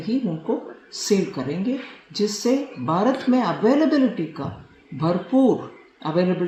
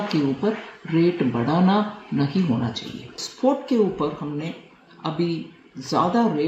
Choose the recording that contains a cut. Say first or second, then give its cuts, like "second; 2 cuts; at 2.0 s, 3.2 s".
second; 1 cut; at 3.2 s